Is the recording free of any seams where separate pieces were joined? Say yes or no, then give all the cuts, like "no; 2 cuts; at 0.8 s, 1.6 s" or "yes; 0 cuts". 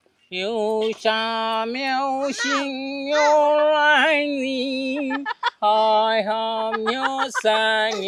yes; 0 cuts